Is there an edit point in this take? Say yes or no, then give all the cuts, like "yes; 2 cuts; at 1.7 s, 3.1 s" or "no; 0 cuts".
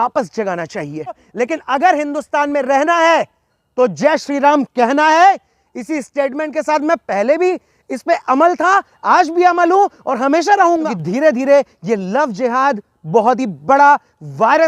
yes; 2 cuts; at 1.3 s, 10.8 s